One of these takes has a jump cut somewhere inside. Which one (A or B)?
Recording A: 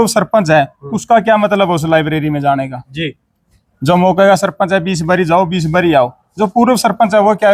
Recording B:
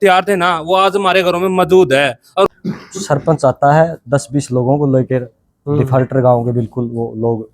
B